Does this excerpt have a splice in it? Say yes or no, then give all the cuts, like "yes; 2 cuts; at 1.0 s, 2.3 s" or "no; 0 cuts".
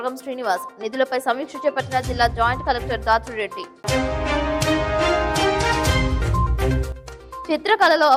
no; 0 cuts